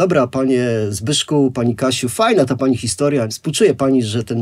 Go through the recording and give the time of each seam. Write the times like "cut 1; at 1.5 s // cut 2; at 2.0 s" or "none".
cut 1; at 3.3 s